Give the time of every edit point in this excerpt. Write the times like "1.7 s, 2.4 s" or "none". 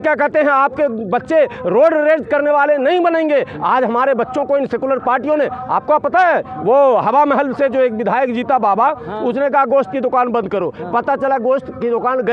none